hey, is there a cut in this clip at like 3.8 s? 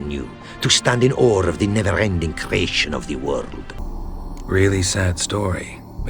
yes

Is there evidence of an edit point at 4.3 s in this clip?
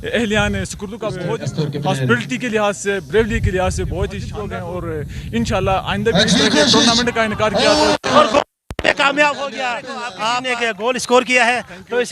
yes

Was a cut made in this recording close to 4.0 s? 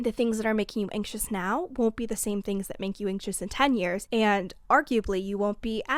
yes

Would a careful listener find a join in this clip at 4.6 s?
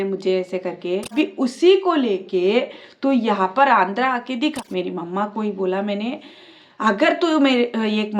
yes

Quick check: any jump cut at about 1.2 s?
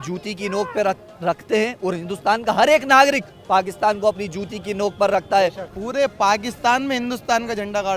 no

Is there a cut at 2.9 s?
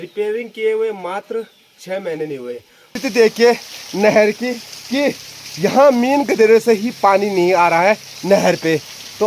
yes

